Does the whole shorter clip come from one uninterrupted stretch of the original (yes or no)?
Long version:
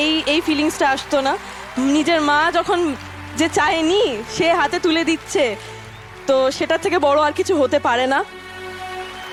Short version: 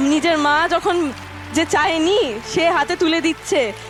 yes